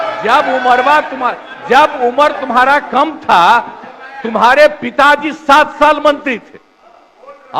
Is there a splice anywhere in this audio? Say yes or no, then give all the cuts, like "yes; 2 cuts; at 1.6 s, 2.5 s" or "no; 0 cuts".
no; 0 cuts